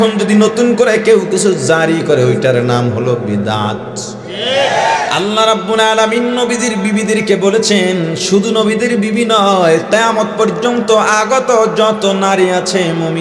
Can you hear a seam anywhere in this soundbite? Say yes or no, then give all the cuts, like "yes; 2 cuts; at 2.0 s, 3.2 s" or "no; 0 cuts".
yes; 1 cut; at 5.1 s